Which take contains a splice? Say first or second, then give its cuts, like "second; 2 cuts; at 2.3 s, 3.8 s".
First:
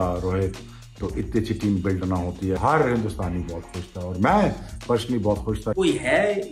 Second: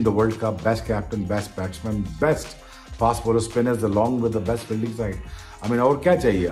first; 2 cuts; at 2.6 s, 5.7 s